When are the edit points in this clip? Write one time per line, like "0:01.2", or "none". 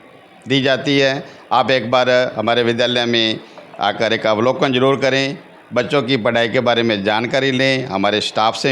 none

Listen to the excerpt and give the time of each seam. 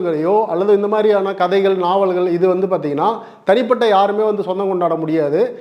none

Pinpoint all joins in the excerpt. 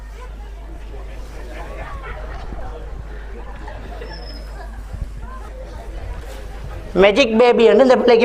0:05.5

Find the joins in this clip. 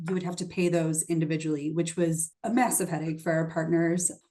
0:02.3

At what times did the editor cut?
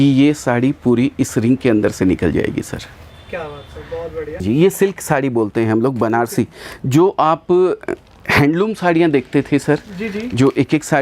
0:04.4

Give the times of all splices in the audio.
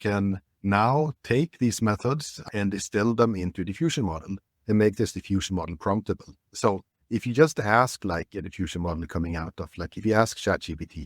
0:02.4
0:06.4

